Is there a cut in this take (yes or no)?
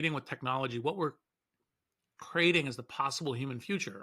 no